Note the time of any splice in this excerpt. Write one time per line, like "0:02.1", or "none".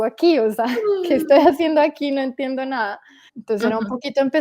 0:03.3